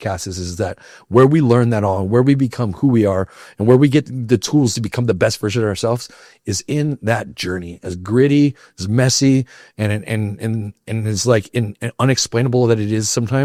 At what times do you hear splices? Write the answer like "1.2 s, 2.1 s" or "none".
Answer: none